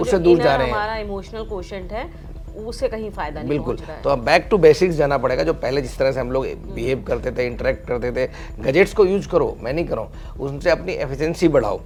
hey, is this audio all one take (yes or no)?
yes